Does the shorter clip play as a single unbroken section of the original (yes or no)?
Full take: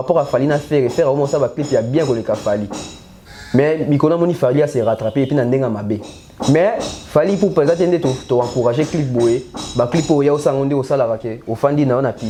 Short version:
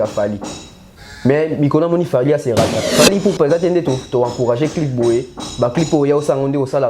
no